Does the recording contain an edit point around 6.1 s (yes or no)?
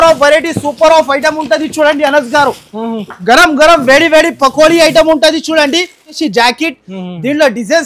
yes